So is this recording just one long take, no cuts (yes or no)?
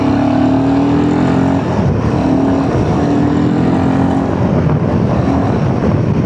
yes